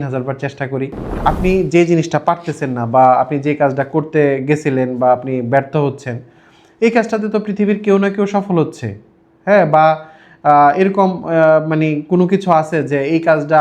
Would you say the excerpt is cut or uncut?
cut